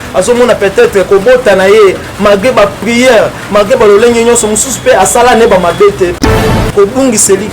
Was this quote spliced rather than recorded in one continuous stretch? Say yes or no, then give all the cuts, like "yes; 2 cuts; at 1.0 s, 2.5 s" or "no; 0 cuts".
yes; 1 cut; at 6.2 s